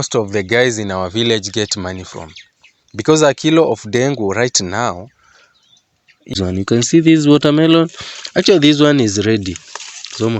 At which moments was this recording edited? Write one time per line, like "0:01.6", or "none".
0:06.3